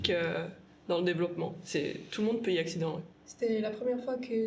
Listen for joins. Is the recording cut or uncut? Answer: cut